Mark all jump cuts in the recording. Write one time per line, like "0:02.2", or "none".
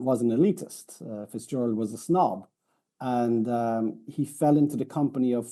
none